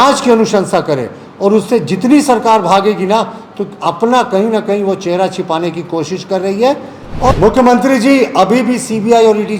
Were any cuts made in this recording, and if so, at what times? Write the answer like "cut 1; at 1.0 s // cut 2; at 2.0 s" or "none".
cut 1; at 7.3 s